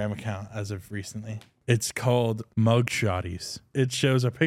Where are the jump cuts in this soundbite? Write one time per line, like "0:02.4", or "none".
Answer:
0:01.5
0:02.4
0:03.7